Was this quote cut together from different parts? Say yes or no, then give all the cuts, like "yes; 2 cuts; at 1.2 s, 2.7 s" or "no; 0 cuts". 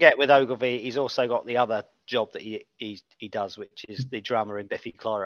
no; 0 cuts